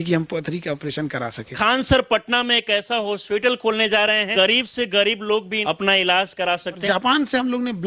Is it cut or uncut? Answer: cut